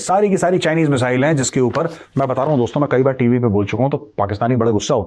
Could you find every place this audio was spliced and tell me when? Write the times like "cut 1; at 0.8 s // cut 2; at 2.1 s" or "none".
none